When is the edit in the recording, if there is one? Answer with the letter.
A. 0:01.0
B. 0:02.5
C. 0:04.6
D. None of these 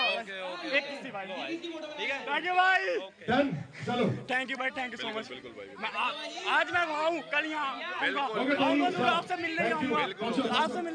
D